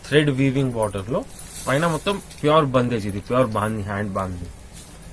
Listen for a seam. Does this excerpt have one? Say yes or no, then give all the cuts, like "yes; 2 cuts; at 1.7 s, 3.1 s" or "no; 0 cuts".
no; 0 cuts